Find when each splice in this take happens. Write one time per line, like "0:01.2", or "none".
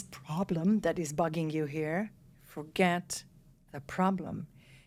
none